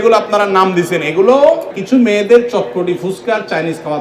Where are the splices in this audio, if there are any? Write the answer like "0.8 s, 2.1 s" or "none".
1.7 s